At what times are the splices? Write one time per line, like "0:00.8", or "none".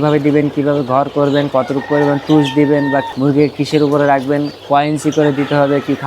0:03.1
0:04.5